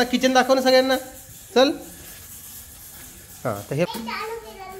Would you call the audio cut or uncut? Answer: cut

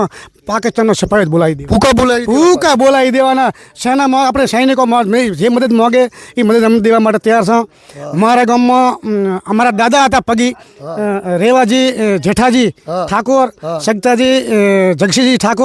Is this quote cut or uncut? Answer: uncut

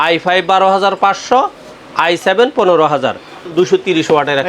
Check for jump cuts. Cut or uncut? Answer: cut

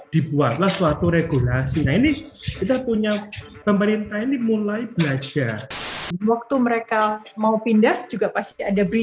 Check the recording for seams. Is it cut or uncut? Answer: cut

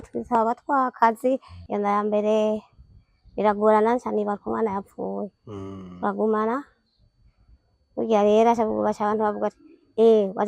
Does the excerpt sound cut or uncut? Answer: cut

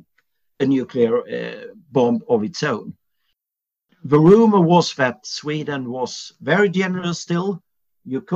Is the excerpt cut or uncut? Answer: cut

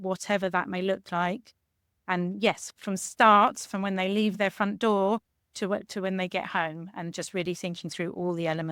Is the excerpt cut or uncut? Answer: uncut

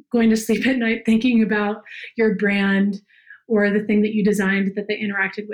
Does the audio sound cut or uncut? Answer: uncut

